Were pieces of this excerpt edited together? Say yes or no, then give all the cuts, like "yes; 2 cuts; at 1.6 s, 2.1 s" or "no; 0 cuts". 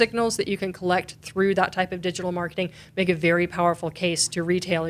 no; 0 cuts